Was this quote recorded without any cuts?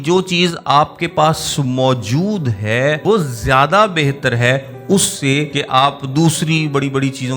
no; 2 cuts; at 3.0 s, 5.6 s

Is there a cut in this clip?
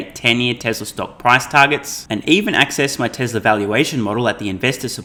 no; 0 cuts

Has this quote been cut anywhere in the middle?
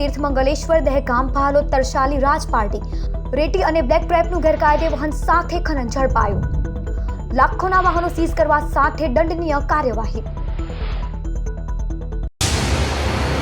yes; 1 cut; at 12.2 s

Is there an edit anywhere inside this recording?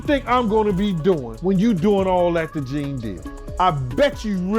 yes; 2 cuts; at 1.3 s, 3.5 s

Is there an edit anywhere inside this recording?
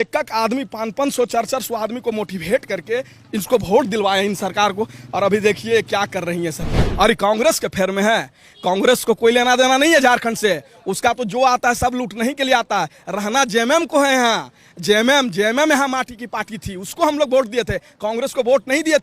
yes; 1 cut; at 6.8 s

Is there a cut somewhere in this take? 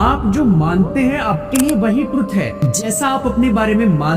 yes; 1 cut; at 2.6 s

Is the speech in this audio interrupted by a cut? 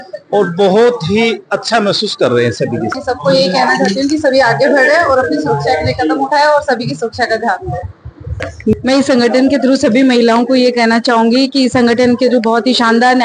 yes; 2 cuts; at 3.0 s, 8.7 s

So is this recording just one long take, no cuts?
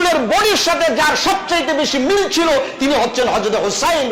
yes; 0 cuts

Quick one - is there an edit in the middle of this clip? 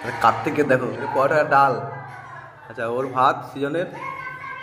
yes; 1 cut; at 1.0 s

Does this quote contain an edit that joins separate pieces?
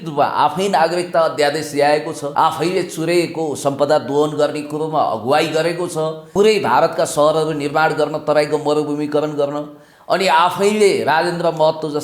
yes; 2 cuts; at 2.2 s, 6.2 s

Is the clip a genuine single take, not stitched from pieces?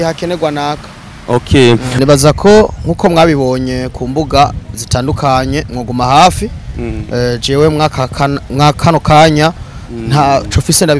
no; 1 cut; at 2.0 s

